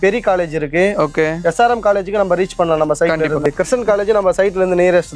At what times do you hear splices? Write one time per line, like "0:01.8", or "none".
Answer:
0:03.4